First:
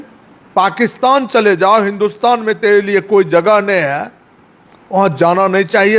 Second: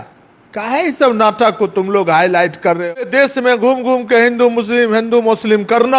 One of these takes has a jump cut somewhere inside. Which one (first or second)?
second